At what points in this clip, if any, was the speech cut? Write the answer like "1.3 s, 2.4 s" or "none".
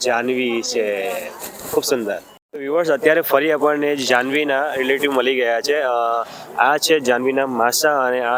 none